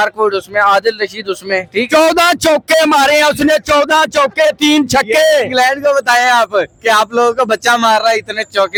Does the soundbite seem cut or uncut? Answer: uncut